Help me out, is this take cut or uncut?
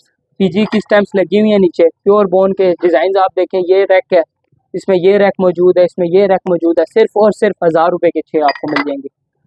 uncut